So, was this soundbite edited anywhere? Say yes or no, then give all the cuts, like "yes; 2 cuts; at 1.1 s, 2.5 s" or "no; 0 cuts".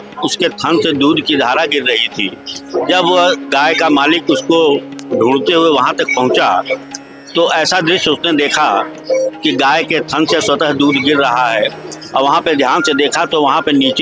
no; 0 cuts